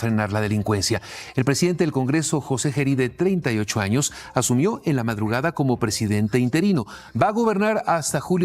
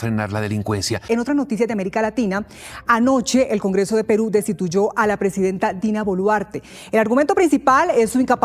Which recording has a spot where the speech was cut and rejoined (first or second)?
second